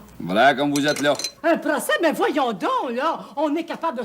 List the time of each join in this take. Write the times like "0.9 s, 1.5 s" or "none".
1.3 s